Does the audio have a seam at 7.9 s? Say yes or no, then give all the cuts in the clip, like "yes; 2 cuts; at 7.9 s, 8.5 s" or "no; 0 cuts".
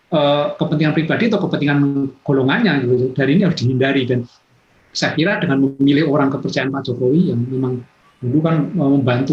no; 0 cuts